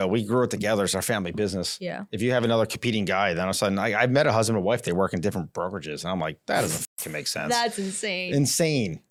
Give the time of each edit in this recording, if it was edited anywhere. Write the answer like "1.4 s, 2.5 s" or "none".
none